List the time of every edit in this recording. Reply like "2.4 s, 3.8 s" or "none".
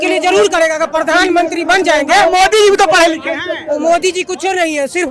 none